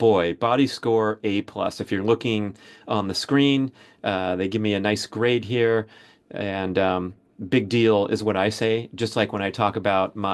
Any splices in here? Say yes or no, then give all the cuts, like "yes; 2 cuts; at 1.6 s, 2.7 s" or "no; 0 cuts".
no; 0 cuts